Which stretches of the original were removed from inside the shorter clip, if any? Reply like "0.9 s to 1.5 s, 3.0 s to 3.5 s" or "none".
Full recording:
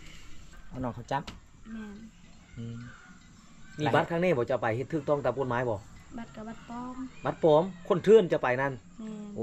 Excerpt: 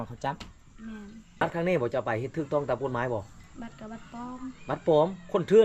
2.3 s to 4.0 s